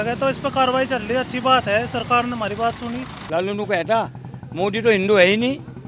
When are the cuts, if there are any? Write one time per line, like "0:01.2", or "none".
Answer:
0:03.2